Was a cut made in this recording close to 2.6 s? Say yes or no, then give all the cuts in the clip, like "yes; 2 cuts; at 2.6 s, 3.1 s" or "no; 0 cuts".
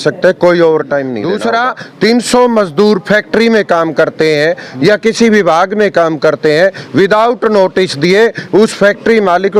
no; 1 cut; at 1.2 s